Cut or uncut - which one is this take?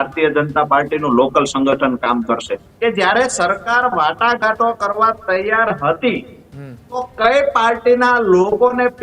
cut